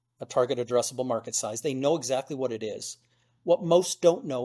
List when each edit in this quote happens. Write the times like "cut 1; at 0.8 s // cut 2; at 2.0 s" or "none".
none